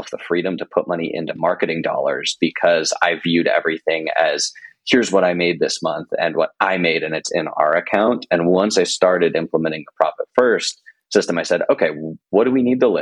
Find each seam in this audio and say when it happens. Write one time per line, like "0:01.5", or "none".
none

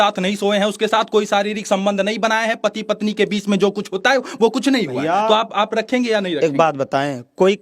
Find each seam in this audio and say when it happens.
none

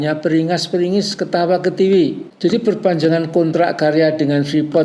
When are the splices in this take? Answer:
0:02.3

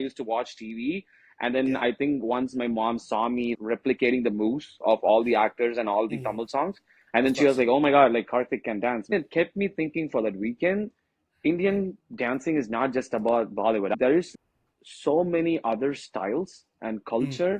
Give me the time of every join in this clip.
0:03.5
0:09.1
0:13.9

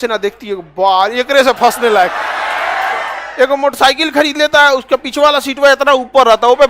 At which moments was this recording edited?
0:03.2

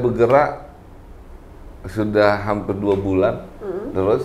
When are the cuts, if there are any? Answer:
none

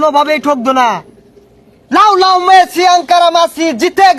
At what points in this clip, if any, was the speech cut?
none

